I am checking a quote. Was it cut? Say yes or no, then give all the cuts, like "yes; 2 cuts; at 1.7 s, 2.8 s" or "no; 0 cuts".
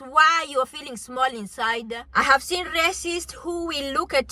yes; 1 cut; at 2.0 s